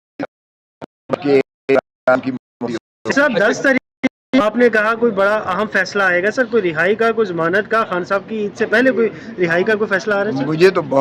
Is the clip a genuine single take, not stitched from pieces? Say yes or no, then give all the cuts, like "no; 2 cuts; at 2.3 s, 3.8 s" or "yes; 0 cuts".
yes; 0 cuts